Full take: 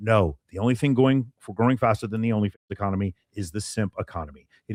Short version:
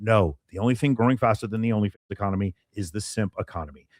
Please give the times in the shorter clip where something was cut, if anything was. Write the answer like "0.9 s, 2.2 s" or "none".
1.0 s

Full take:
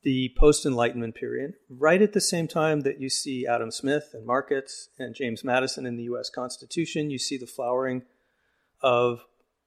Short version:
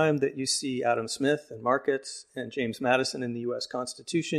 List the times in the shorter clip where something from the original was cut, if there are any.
none

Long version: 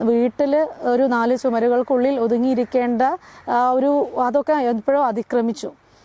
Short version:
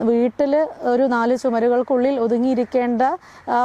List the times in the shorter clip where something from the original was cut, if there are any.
none

